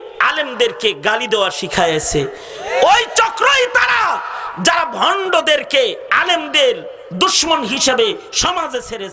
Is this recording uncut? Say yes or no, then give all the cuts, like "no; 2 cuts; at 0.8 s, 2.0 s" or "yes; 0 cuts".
yes; 0 cuts